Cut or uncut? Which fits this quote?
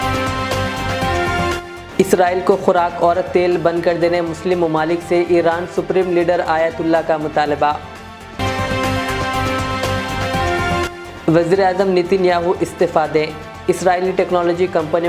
cut